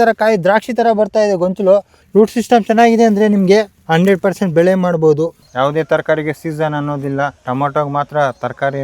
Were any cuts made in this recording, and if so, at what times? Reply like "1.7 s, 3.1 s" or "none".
2.0 s, 3.8 s, 5.4 s, 7.4 s